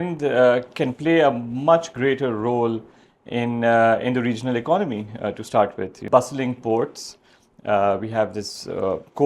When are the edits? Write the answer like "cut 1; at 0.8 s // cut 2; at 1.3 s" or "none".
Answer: cut 1; at 6.0 s